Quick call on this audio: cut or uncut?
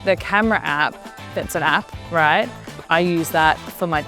uncut